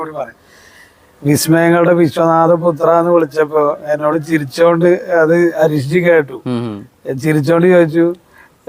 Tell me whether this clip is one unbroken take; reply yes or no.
yes